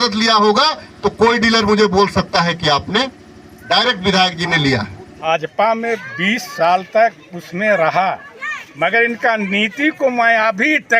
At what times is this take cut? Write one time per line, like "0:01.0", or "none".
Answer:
0:05.1